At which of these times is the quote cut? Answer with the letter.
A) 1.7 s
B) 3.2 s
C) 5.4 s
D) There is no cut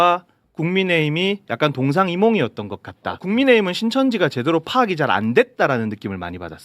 B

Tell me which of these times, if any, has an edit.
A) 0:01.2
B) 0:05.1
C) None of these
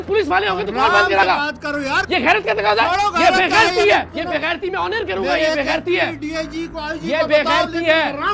A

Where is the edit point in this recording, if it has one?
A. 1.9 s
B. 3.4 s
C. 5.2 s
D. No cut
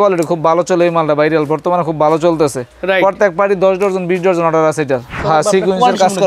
C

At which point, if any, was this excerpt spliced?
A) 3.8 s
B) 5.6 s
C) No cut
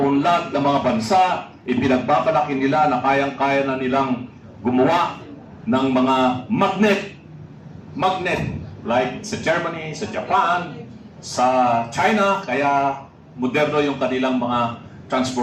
C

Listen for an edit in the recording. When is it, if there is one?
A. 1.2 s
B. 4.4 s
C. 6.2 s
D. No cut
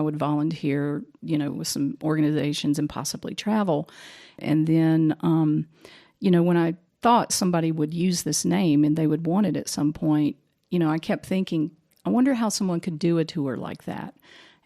B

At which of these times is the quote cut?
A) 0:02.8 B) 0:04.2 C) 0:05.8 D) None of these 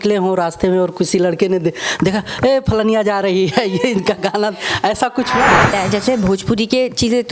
C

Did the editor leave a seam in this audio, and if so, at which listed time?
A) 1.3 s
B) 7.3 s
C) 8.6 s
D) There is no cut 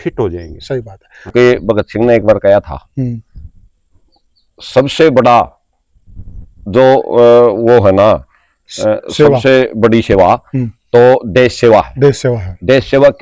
A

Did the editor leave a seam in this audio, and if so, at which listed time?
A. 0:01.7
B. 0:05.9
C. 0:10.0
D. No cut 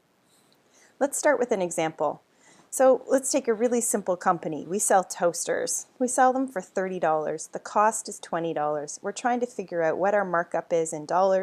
A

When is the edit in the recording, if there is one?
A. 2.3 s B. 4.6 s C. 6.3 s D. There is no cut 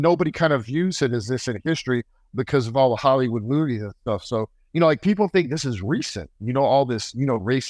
B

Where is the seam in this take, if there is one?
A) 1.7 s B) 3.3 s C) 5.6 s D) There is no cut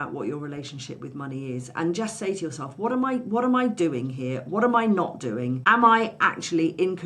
C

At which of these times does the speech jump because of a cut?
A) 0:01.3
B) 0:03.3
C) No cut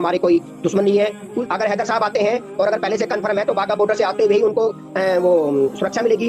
A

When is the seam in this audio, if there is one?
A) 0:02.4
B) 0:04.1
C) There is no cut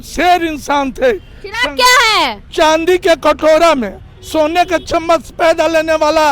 A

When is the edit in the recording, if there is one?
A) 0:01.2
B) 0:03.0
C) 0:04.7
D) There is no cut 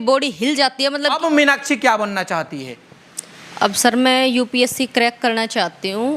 A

